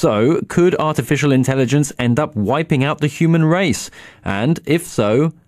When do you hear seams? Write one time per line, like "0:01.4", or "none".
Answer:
none